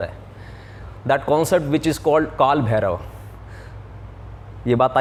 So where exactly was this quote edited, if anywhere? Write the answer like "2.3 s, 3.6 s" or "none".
none

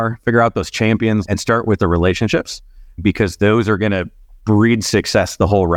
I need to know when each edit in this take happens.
1.2 s

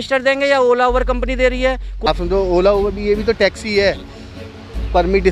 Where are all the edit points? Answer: 2.1 s

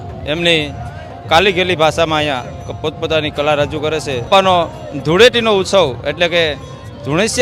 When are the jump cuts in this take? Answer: 4.3 s

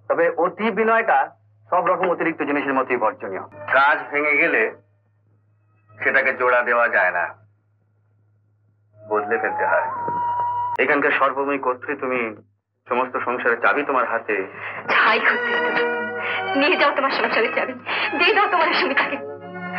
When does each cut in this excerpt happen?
3.4 s, 10.7 s

